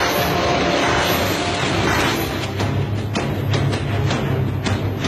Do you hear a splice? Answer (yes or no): yes